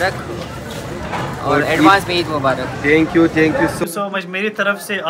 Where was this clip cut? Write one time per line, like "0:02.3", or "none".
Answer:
0:03.8